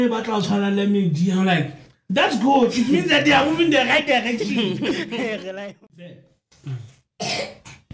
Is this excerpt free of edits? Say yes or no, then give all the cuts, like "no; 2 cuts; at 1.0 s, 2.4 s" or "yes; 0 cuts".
no; 1 cut; at 6.2 s